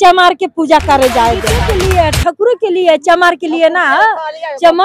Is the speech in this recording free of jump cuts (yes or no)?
no